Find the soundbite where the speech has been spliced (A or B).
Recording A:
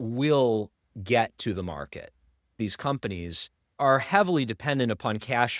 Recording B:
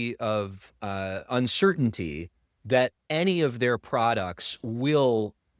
A